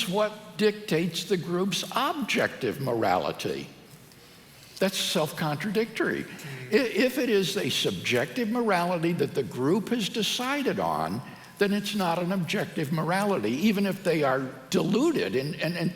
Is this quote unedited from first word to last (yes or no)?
no